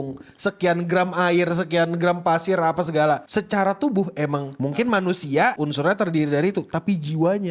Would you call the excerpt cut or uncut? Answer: cut